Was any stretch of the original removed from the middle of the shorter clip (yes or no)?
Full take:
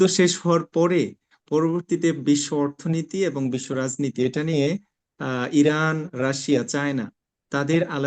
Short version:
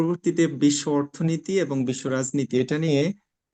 no